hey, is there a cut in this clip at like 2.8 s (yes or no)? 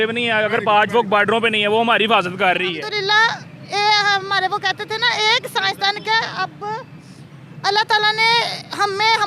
yes